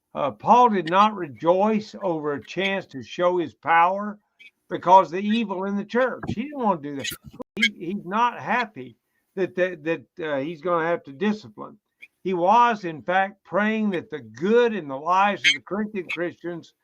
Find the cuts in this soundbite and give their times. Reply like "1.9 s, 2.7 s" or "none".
7.4 s

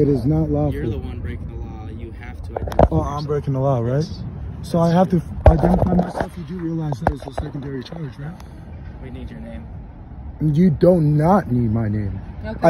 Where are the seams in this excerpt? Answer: 8.4 s

